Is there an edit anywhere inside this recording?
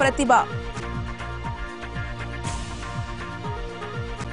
no; 0 cuts

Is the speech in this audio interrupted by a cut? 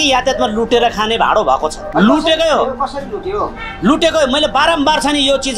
yes; 1 cut; at 1.8 s

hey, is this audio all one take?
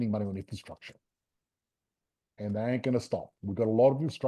yes; 0 cuts

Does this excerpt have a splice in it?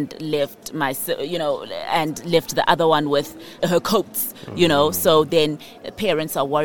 yes; 1 cut; at 3.6 s

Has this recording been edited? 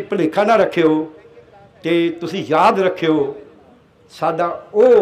no; 0 cuts

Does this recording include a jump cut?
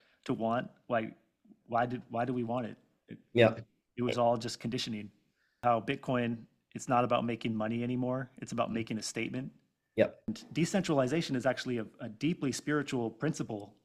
yes; 2 cuts; at 5.6 s, 10.3 s

